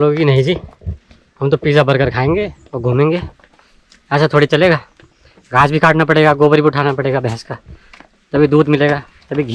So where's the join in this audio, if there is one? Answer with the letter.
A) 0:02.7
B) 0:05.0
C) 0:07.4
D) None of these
D